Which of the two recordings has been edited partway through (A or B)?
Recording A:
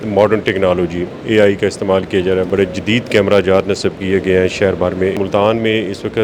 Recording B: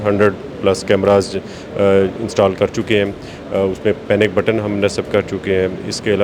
A